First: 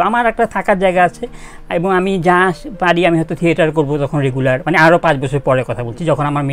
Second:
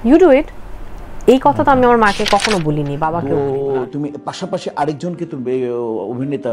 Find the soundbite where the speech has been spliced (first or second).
second